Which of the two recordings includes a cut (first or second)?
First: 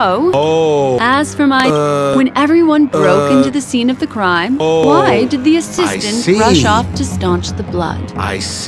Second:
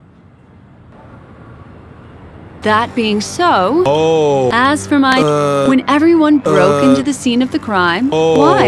second